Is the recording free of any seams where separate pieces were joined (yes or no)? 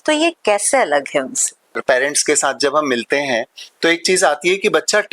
no